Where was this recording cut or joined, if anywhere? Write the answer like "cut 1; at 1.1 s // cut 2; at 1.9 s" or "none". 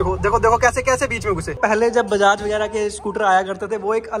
cut 1; at 1.6 s